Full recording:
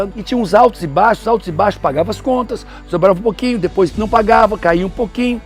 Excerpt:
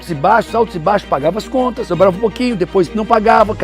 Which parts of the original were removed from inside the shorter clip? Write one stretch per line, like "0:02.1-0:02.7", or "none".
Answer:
0:02.6-0:02.9